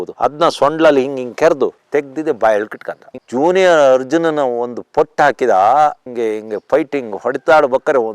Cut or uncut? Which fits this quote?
cut